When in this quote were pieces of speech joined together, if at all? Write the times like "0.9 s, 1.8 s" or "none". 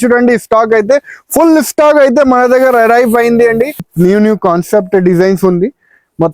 3.9 s